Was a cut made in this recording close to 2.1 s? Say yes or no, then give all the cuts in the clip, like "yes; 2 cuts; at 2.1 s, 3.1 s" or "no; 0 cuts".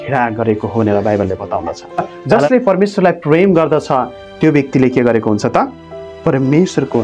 yes; 1 cut; at 2.1 s